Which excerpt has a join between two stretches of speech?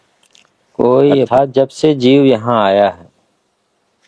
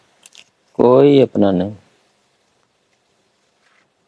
first; 1 cut; at 1.3 s

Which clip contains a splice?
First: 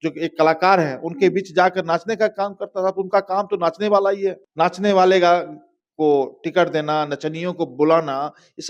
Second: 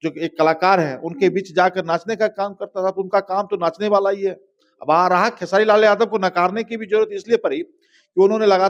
first; 1 cut; at 4.4 s

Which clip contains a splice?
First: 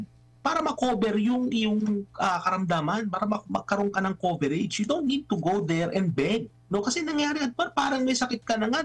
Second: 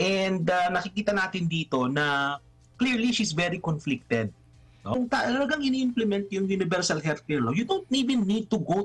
second; 1 cut; at 4.9 s

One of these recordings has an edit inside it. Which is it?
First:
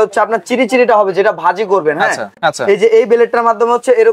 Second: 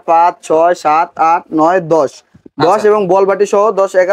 first; 1 cut; at 2.4 s

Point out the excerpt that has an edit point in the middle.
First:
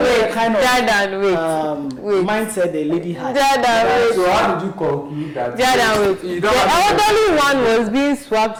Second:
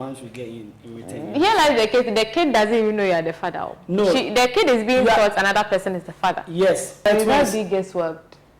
second; 1 cut; at 7.1 s

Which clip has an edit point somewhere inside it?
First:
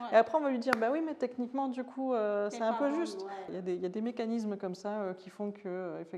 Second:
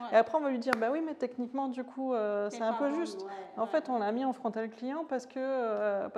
first; 1 cut; at 3.5 s

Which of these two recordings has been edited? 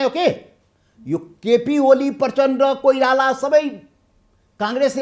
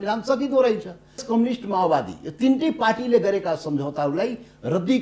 second; 1 cut; at 1.2 s

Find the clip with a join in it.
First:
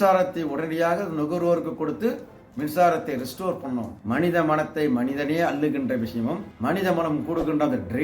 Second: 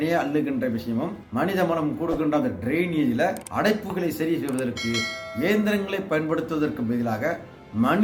first; 1 cut; at 4.0 s

